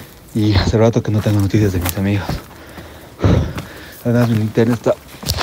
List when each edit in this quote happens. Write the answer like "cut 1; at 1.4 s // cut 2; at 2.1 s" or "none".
none

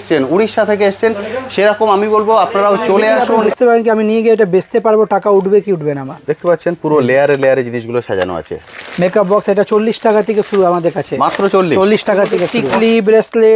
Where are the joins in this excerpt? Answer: cut 1; at 3.5 s // cut 2; at 12.6 s

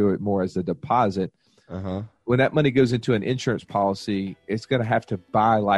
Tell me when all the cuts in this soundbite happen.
none

